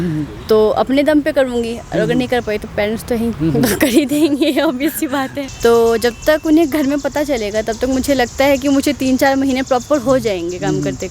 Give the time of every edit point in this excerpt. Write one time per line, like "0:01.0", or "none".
0:05.4